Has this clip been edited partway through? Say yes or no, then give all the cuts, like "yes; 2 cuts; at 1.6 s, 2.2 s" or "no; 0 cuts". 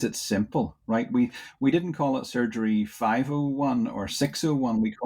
no; 0 cuts